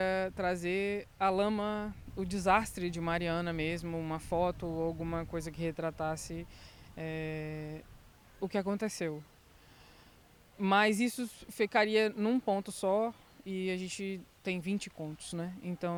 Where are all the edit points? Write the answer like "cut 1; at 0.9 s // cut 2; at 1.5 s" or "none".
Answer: none